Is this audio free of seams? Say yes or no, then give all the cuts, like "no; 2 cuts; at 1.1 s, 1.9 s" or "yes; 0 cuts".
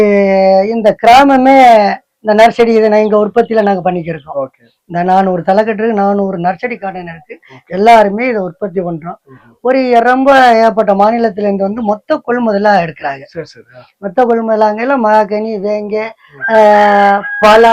yes; 0 cuts